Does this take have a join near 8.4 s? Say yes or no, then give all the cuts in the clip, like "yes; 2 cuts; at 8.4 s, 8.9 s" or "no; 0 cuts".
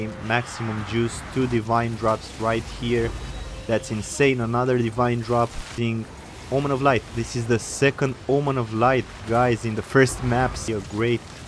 no; 2 cuts; at 5.7 s, 10.6 s